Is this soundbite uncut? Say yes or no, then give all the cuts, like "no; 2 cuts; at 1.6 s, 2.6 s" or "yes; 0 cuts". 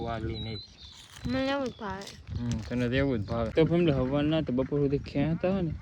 no; 1 cut; at 3.5 s